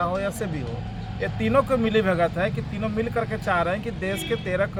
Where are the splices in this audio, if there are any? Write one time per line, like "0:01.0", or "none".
none